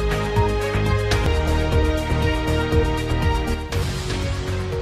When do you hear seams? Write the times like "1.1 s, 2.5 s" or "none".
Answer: none